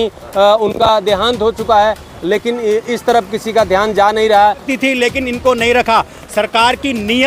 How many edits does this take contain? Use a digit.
1